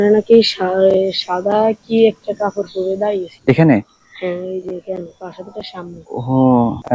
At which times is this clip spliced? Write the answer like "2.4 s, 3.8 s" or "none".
none

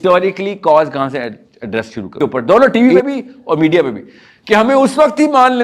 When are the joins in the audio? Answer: 2.2 s

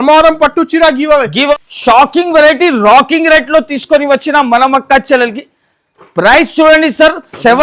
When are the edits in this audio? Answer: 1.5 s

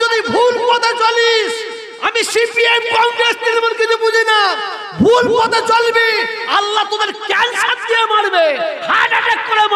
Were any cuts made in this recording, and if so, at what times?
5.8 s

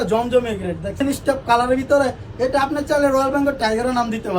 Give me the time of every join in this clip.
1.0 s

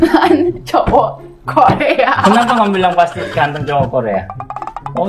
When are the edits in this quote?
none

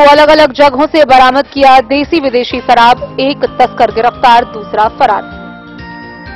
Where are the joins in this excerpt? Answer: none

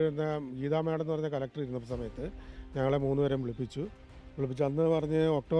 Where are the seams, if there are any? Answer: none

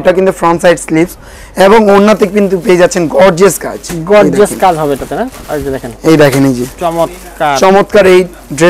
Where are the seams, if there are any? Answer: none

